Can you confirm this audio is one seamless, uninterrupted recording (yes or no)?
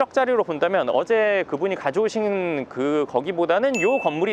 yes